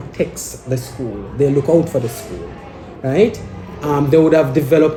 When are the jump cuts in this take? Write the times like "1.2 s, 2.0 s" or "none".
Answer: none